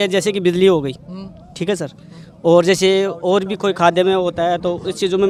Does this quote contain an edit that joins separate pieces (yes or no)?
no